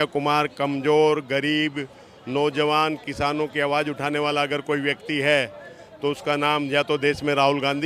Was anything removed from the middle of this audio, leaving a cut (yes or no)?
no